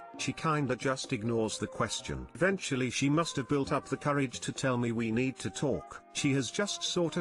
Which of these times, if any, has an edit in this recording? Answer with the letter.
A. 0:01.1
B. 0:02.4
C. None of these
B